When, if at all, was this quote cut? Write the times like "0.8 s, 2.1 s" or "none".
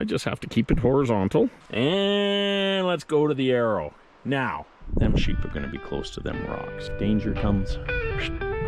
1.6 s, 4.9 s, 6.8 s